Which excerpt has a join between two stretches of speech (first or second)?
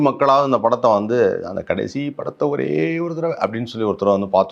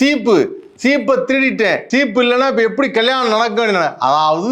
second